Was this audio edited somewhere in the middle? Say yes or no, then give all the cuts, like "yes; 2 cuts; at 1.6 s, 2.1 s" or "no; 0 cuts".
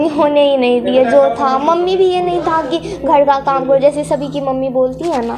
no; 0 cuts